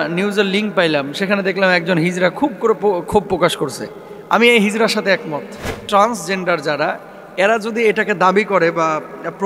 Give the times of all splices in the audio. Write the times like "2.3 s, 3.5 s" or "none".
5.8 s